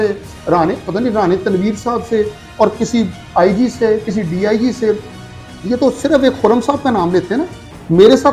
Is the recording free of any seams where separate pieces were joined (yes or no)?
yes